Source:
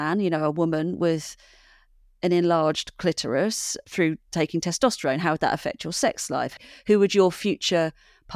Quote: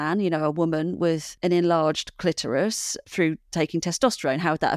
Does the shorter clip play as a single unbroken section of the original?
no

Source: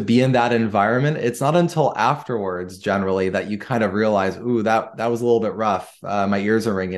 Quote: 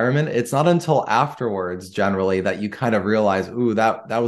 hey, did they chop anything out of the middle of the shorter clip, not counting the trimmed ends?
no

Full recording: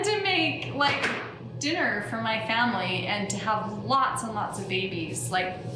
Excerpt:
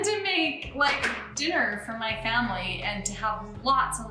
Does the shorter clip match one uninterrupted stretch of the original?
no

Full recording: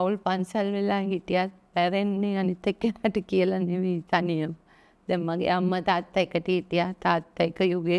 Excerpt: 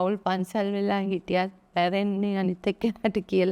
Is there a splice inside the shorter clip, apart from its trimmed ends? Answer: no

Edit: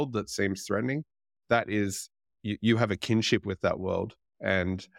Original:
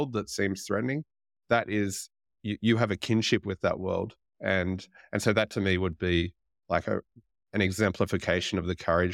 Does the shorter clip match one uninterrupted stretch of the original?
yes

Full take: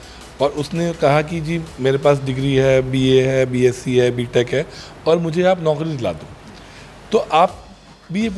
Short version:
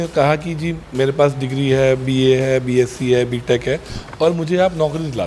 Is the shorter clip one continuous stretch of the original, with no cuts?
yes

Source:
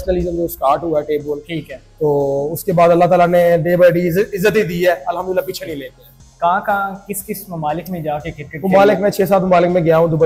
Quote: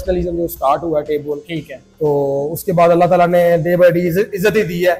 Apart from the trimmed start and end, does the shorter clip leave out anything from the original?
no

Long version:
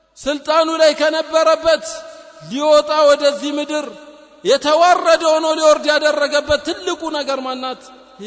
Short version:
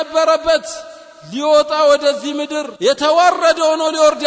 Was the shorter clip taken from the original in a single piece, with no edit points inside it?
no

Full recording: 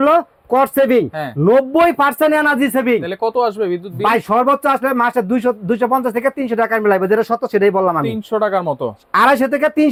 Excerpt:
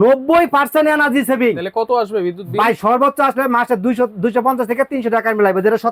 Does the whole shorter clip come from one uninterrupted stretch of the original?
yes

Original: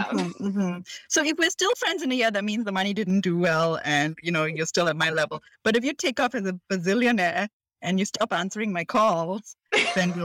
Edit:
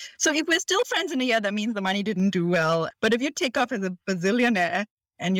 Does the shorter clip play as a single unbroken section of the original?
no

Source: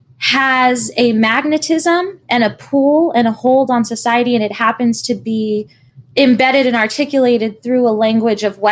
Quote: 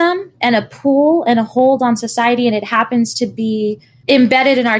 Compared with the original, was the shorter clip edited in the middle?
yes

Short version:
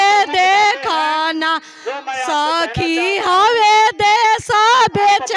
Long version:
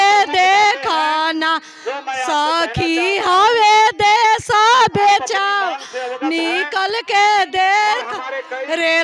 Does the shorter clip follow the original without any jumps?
yes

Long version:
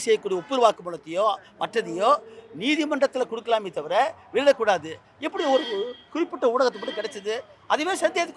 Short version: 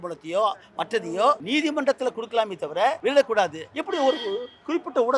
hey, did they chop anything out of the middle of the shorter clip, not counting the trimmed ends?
yes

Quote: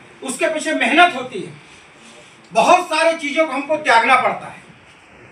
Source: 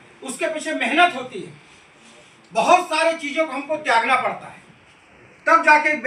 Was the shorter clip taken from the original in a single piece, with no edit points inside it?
yes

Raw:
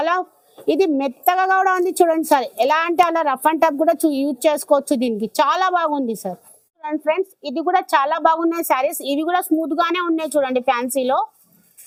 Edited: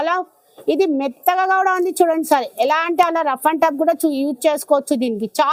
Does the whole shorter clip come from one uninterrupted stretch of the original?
yes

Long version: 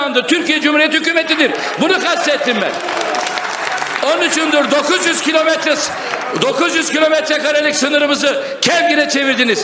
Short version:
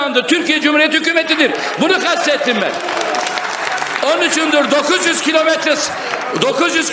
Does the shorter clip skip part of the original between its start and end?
no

